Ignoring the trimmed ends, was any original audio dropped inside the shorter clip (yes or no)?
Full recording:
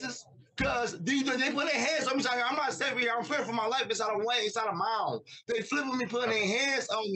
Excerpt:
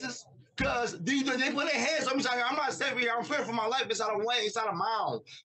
no